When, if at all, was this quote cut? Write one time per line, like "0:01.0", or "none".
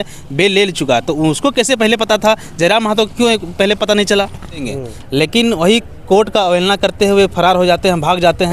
0:04.7